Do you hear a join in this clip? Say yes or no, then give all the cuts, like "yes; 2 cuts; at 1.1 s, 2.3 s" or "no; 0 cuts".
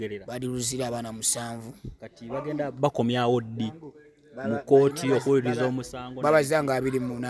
no; 0 cuts